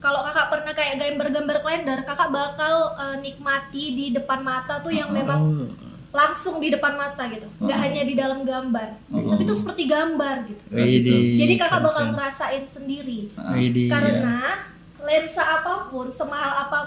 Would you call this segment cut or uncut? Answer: uncut